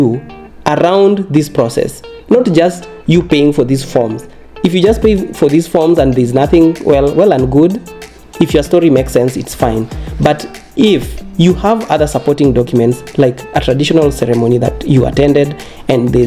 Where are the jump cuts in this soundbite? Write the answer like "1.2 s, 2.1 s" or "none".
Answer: none